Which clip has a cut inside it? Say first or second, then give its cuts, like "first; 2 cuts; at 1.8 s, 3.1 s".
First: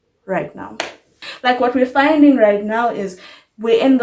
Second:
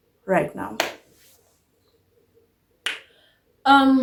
first; 1 cut; at 1.2 s